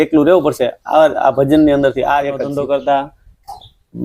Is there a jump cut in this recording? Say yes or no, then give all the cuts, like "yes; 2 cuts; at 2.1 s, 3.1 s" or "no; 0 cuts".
yes; 1 cut; at 2.4 s